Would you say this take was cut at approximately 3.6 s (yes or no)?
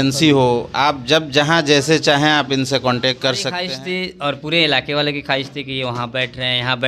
yes